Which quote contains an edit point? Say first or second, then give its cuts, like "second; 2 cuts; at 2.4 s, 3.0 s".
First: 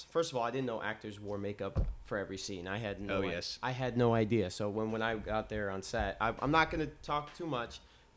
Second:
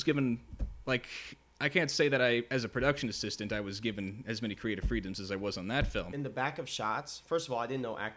second; 1 cut; at 6.1 s